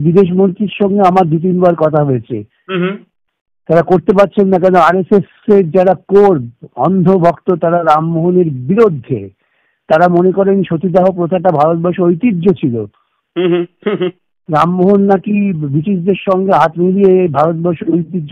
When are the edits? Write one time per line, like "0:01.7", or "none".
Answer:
none

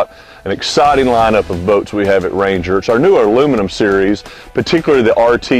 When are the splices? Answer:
none

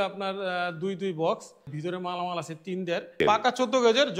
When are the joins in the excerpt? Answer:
0:01.6
0:03.2

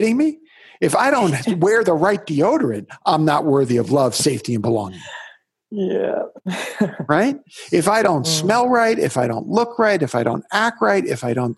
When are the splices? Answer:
none

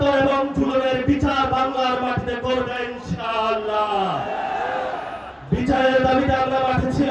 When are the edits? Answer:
none

